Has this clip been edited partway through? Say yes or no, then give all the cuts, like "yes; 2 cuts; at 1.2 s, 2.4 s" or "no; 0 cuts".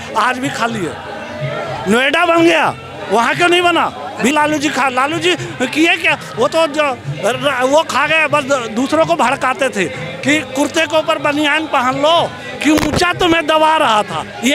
yes; 1 cut; at 4.3 s